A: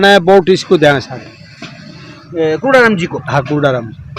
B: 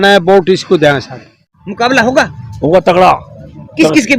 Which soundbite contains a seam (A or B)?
B